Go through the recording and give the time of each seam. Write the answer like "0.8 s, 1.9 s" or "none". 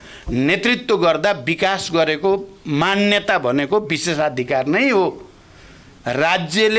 none